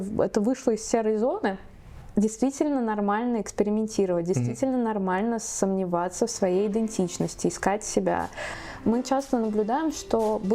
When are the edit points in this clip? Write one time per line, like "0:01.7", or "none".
0:01.9
0:08.5